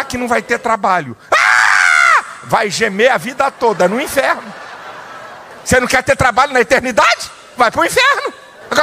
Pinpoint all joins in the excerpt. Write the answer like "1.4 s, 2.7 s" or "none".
none